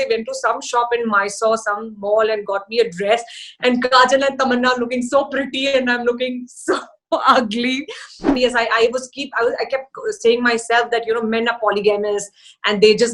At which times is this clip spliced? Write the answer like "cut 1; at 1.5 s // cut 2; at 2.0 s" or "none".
cut 1; at 8.4 s